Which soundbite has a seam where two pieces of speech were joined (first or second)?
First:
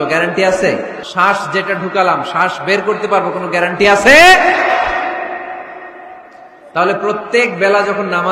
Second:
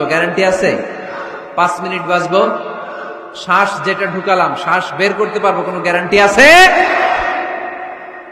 first